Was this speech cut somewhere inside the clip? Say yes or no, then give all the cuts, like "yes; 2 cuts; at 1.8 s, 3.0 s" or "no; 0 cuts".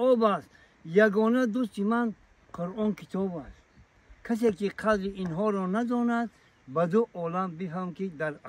no; 0 cuts